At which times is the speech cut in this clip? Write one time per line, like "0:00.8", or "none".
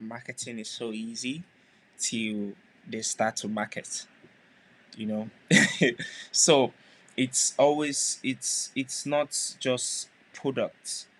none